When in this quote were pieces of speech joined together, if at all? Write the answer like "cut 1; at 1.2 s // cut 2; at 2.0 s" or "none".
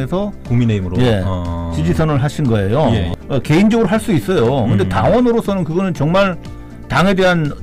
cut 1; at 3.1 s